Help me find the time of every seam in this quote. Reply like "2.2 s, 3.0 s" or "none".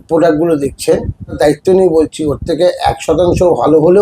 1.4 s

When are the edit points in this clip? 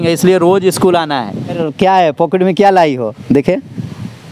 1.6 s

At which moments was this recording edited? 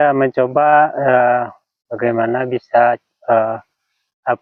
none

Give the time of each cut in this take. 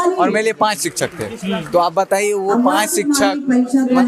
none

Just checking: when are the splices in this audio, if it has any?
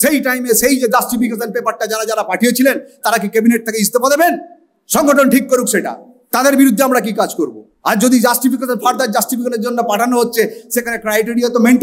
none

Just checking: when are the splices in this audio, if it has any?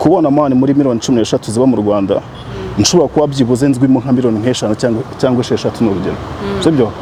none

